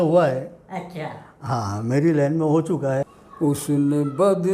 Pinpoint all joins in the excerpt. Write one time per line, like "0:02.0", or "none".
0:03.0